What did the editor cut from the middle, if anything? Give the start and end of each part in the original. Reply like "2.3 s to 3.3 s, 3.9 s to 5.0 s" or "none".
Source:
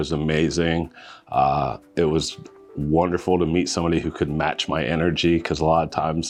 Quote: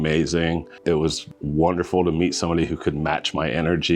1.2 s to 2.3 s